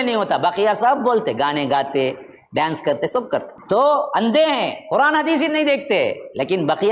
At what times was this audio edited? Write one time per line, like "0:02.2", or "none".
0:03.5